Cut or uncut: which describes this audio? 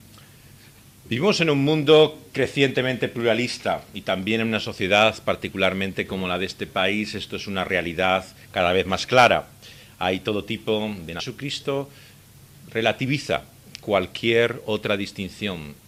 uncut